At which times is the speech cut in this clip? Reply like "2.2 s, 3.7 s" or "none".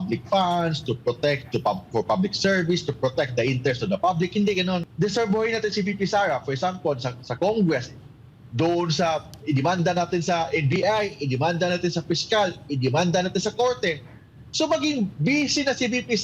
4.9 s